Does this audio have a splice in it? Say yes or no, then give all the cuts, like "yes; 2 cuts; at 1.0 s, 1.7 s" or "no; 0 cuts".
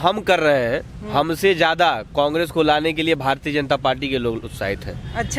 no; 0 cuts